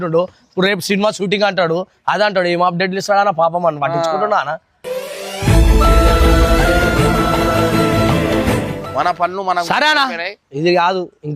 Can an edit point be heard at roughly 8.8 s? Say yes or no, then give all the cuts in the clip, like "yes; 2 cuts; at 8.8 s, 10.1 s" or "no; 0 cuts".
yes; 1 cut; at 8.8 s